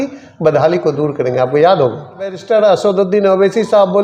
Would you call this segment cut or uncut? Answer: cut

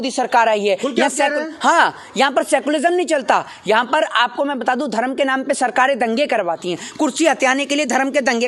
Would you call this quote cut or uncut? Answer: uncut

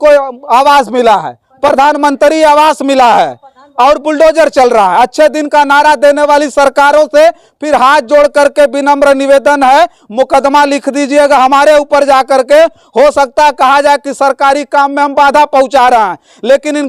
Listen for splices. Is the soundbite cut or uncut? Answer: uncut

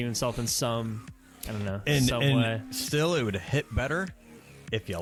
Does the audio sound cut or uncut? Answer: uncut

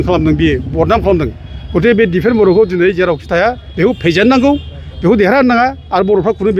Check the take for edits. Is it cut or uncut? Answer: uncut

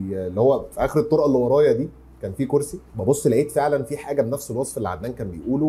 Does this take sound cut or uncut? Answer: cut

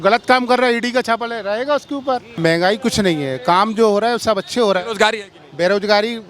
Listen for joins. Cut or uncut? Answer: cut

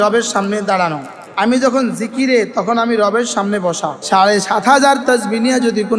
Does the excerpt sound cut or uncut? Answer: cut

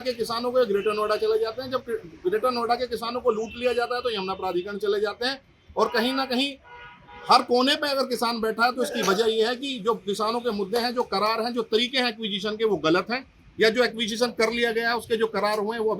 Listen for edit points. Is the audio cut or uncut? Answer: uncut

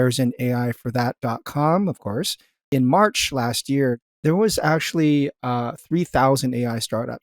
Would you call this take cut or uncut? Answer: cut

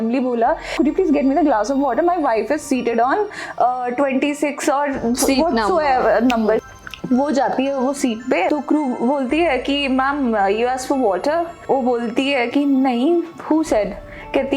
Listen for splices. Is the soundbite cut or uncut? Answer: cut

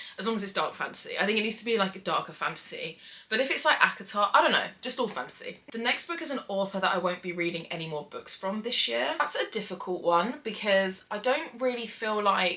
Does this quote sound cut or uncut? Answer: uncut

